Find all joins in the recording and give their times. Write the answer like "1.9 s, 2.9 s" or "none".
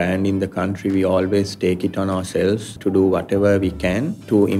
2.7 s